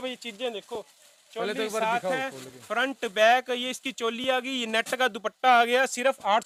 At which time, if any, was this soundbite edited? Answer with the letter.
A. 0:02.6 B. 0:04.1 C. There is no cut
C